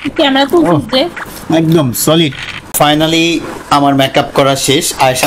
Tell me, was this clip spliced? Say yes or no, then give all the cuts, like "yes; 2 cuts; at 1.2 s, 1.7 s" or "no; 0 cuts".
yes; 1 cut; at 2.6 s